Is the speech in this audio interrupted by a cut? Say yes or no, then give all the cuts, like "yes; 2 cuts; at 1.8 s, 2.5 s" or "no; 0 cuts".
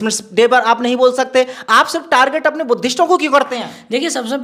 no; 0 cuts